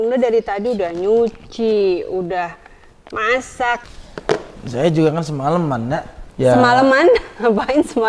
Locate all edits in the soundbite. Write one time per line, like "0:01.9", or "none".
0:03.8
0:06.2